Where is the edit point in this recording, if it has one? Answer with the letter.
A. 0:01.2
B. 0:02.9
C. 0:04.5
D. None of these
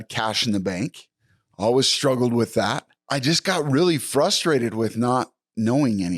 B